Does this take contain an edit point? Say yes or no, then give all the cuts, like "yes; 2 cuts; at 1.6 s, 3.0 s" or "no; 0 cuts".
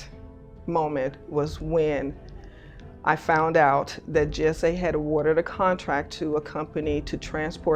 no; 0 cuts